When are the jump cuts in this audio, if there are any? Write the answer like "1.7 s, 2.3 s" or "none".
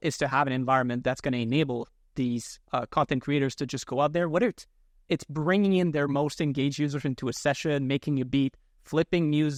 none